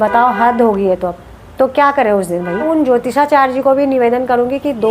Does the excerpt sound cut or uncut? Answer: cut